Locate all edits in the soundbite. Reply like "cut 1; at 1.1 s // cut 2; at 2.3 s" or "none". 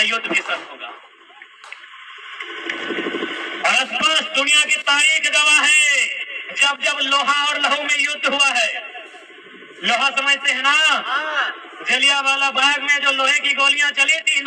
none